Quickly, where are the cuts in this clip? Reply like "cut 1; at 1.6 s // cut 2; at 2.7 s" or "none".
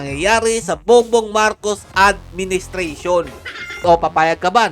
cut 1; at 3.8 s